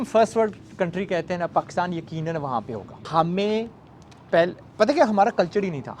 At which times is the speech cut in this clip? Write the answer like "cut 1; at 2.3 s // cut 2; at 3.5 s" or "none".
cut 1; at 3.0 s